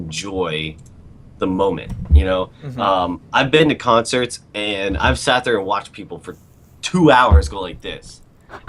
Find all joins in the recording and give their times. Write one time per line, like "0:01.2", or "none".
0:03.8